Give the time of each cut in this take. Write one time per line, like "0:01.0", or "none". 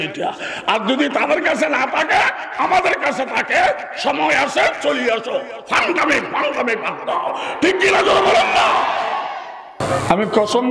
0:09.8